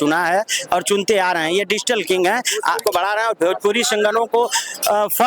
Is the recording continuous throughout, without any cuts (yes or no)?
no